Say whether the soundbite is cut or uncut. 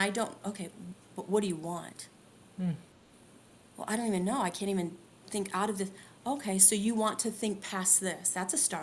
uncut